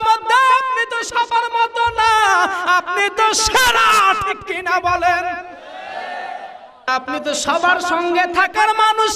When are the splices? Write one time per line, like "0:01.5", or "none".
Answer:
0:06.9

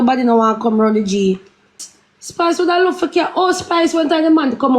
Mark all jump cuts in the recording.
0:01.8

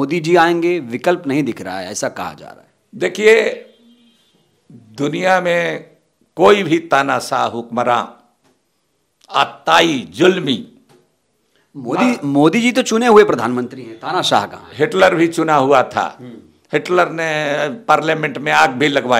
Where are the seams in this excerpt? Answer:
none

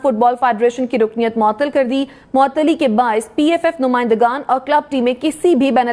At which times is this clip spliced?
none

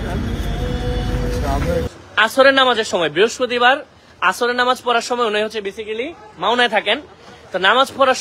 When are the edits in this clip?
0:01.9

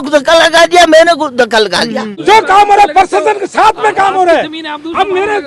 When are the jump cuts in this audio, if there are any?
0:02.1

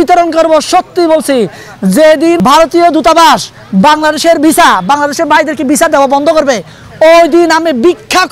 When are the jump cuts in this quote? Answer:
0:02.4

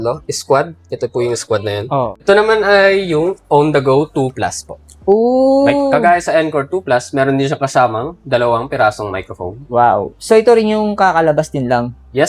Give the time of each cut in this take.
0:02.2

